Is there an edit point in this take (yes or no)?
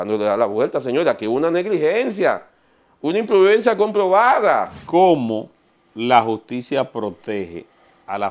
yes